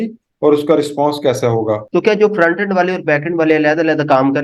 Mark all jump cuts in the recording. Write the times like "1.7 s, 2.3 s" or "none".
1.8 s